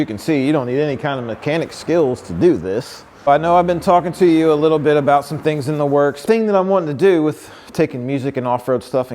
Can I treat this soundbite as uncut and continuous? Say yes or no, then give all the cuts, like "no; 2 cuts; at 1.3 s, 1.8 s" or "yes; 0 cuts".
no; 2 cuts; at 3.3 s, 6.2 s